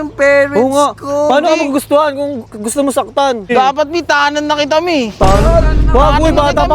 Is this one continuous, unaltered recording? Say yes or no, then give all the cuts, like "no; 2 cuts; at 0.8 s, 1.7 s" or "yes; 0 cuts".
no; 1 cut; at 3.5 s